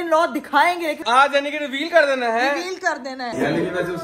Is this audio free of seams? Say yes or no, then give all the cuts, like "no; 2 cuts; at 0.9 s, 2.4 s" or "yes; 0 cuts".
no; 2 cuts; at 1.0 s, 3.3 s